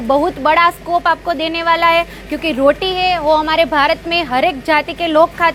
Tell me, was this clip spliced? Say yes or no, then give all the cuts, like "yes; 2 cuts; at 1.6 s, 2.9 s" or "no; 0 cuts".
no; 0 cuts